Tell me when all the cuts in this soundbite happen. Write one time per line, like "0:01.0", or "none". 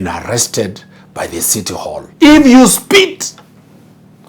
0:02.0